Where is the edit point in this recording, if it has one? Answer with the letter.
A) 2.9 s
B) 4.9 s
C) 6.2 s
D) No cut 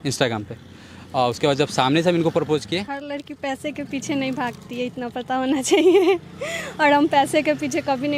A